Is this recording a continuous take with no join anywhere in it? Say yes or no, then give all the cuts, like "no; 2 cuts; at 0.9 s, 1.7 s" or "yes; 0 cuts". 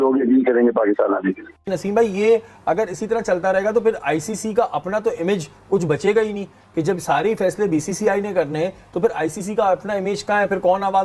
no; 1 cut; at 1.5 s